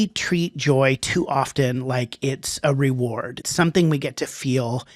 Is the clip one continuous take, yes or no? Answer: no